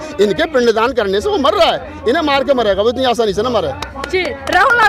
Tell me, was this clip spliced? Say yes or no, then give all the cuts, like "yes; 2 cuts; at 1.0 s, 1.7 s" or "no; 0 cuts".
no; 0 cuts